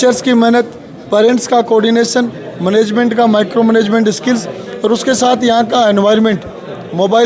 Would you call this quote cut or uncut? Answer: uncut